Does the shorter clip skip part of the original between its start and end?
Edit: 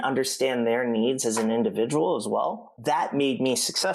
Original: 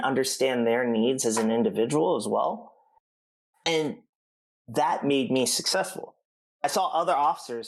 yes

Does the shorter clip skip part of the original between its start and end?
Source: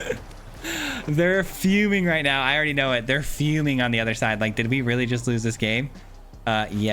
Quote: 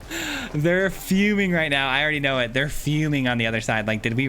no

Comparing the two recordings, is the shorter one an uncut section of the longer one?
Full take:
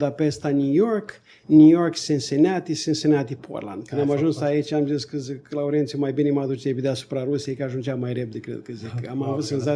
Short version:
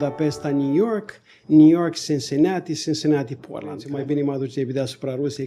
no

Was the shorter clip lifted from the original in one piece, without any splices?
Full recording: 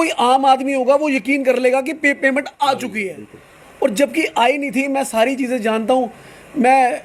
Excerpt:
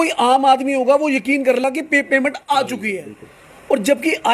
no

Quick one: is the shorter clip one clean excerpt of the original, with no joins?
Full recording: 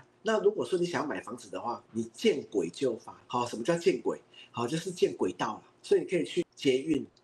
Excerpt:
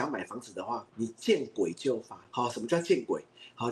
yes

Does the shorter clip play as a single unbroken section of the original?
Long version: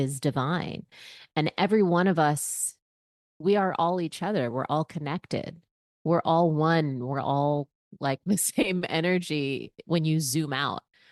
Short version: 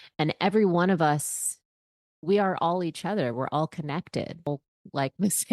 no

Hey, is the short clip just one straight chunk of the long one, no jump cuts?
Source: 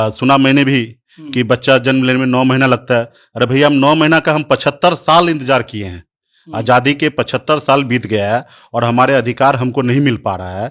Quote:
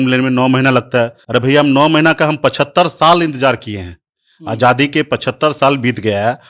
no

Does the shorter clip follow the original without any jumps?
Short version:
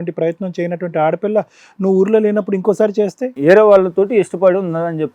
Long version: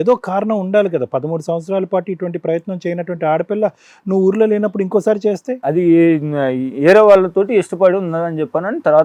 no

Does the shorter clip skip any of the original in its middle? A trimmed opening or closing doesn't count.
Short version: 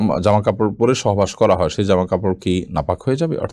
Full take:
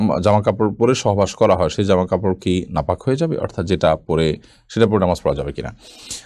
no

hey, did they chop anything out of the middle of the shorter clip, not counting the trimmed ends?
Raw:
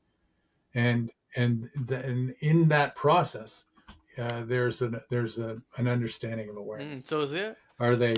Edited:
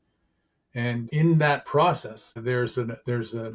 yes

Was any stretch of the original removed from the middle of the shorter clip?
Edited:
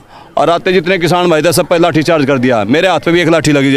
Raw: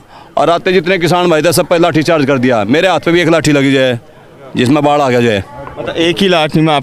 no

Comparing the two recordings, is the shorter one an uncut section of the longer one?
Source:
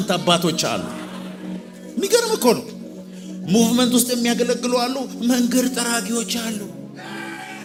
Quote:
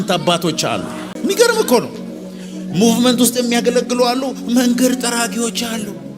no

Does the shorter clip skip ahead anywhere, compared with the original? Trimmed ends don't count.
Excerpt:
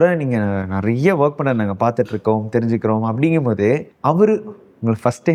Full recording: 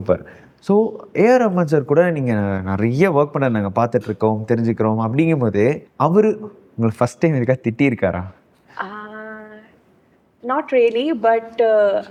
no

